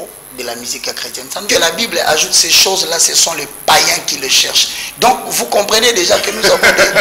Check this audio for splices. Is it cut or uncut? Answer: cut